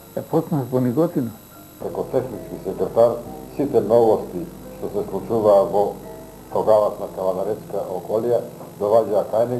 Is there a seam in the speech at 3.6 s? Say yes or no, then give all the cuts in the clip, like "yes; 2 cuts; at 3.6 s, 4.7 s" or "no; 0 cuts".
no; 1 cut; at 1.8 s